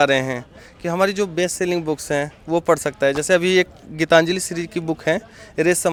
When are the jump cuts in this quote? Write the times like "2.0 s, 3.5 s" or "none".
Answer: none